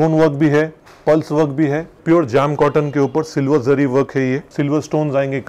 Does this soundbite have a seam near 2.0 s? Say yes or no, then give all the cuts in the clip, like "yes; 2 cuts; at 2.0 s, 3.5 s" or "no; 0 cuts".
yes; 2 cuts; at 2.0 s, 4.5 s